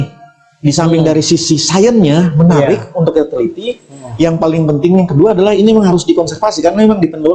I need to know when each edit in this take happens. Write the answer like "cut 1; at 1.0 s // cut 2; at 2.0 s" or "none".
none